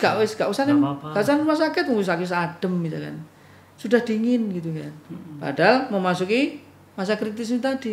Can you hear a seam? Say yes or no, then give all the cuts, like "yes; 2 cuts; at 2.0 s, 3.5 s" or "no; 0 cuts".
no; 0 cuts